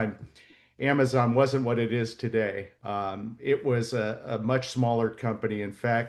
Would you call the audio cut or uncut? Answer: uncut